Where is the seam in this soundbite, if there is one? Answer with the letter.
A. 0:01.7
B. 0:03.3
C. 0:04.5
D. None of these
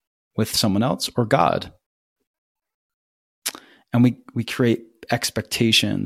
D